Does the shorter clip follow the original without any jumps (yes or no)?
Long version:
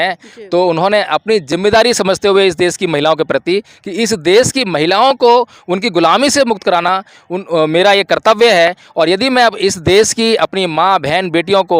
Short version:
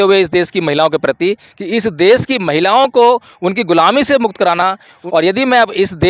no